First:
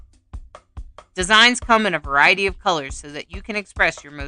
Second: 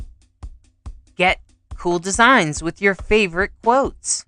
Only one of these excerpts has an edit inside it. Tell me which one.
first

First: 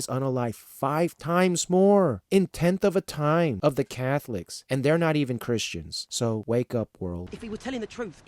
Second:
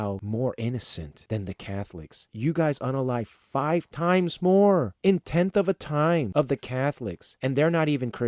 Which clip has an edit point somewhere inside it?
first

